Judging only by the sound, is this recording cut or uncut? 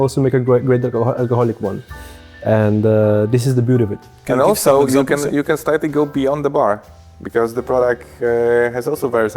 uncut